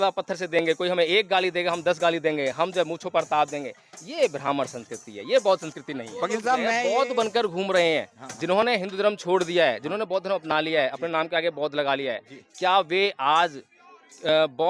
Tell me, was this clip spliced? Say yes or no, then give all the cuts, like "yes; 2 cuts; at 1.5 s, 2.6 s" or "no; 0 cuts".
yes; 1 cut; at 6.7 s